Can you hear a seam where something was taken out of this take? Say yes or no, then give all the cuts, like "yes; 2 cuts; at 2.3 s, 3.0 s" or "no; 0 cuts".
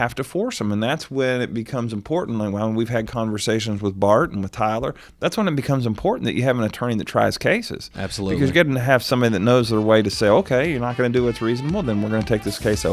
no; 0 cuts